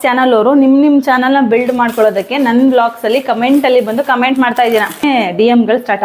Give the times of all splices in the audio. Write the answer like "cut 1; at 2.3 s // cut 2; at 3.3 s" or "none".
cut 1; at 5.0 s